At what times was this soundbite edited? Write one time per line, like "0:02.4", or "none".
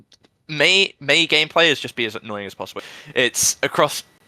0:02.7